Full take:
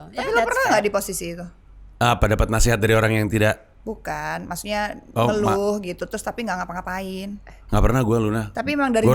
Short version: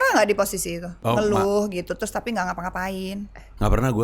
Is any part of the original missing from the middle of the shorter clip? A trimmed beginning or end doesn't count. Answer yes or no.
yes